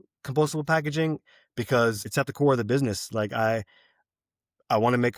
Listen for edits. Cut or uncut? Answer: cut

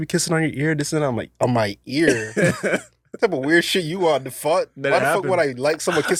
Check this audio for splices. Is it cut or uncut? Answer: uncut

